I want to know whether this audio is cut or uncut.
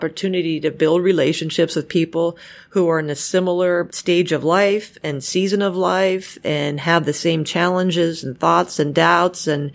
uncut